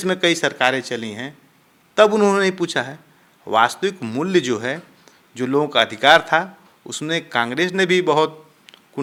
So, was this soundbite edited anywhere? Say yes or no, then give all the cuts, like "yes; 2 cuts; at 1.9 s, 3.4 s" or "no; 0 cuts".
no; 0 cuts